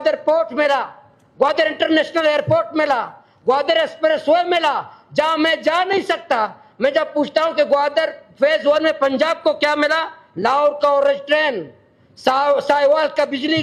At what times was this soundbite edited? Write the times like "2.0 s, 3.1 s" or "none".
none